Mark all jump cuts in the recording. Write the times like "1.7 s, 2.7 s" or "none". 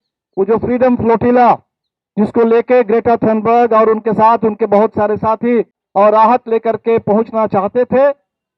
5.8 s